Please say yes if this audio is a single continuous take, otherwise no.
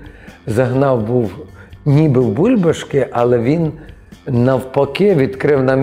yes